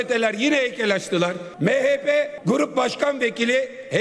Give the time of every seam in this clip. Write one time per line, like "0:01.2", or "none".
0:01.4
0:02.3